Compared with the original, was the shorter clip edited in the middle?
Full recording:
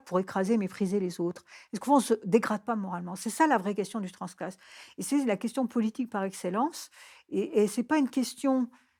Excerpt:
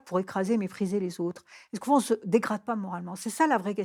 no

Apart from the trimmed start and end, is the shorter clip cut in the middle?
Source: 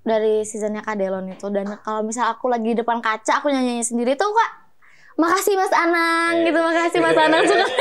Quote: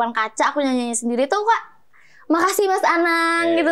no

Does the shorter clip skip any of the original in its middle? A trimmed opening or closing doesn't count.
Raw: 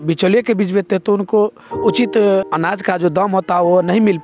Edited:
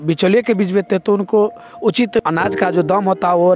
yes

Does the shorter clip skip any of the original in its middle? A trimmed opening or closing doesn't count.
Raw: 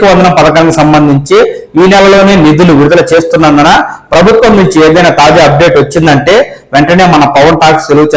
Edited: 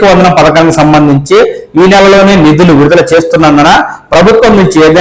no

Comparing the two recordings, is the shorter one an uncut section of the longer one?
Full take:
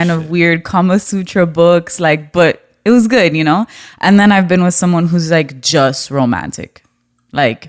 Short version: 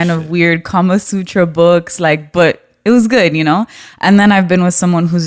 yes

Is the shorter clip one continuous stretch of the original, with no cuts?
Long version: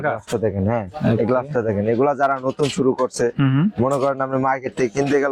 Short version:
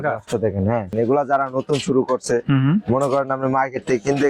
no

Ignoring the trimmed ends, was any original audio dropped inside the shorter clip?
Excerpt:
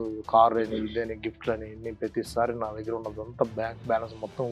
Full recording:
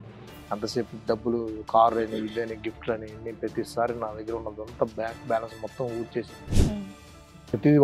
no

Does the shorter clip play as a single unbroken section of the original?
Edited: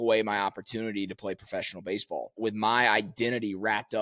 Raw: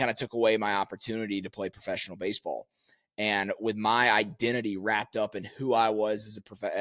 no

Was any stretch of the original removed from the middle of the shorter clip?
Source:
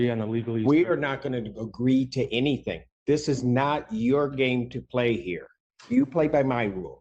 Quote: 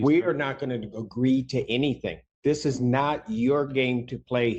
no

